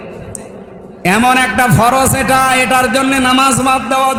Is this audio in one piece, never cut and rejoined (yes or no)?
yes